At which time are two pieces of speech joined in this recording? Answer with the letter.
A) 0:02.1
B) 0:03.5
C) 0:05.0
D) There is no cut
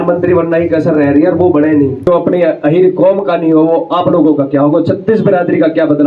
A